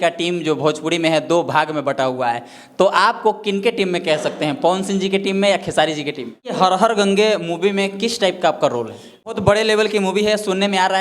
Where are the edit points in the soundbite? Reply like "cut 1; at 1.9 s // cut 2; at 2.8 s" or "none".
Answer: cut 1; at 6.5 s // cut 2; at 9.3 s